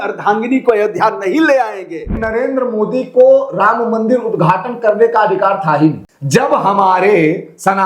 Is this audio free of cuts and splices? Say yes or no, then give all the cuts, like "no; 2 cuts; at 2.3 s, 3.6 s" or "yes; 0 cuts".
no; 2 cuts; at 2.2 s, 6.1 s